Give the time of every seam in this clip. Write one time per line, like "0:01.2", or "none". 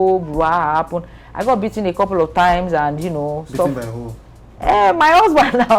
none